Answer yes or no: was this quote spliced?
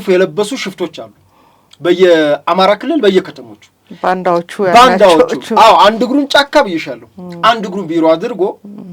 no